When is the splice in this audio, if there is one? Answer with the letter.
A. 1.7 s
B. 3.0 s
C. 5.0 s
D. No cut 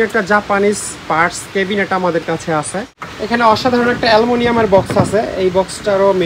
B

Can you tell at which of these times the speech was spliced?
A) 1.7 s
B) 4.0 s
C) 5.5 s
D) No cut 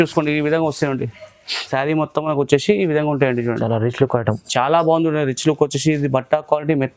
A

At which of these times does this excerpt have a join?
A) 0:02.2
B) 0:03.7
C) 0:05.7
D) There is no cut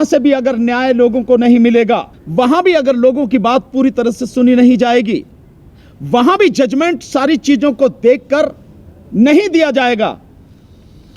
A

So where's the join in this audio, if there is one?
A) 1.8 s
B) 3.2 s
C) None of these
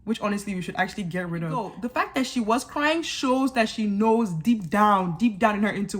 A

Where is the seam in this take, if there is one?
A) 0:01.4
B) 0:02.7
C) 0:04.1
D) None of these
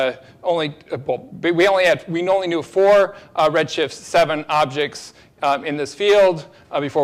D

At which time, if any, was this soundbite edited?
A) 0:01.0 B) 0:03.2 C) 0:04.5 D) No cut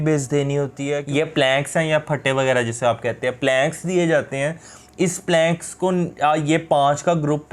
A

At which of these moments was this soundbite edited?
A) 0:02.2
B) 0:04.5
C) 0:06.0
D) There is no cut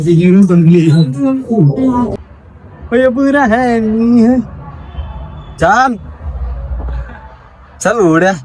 A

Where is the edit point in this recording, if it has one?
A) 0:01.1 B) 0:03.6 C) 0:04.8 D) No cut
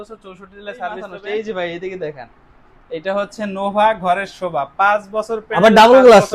A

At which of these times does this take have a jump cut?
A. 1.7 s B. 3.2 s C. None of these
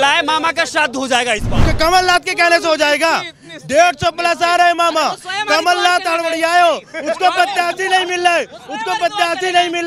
A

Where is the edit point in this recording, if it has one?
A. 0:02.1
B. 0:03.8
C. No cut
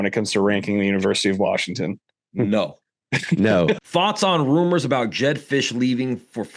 B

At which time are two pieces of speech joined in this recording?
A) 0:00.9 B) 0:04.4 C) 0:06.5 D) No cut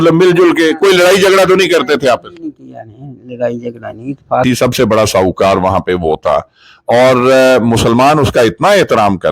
B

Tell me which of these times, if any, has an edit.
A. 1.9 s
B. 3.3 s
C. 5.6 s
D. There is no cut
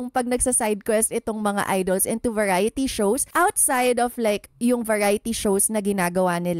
B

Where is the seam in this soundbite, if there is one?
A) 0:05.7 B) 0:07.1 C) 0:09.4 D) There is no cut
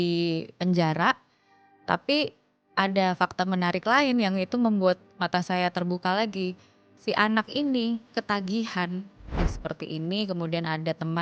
C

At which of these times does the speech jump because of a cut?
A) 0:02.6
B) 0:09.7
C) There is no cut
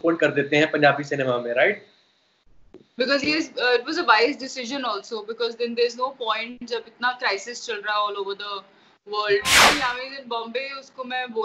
B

